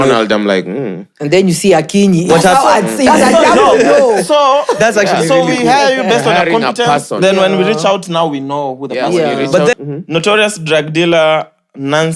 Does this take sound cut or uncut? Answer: cut